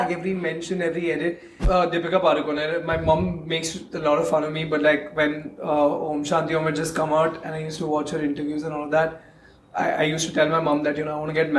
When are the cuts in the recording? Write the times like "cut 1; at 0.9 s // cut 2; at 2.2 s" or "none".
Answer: cut 1; at 1.5 s